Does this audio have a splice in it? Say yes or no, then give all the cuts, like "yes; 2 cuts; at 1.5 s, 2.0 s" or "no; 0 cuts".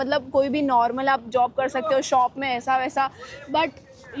no; 0 cuts